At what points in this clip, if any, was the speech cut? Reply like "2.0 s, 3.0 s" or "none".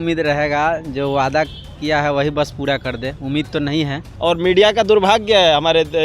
4.0 s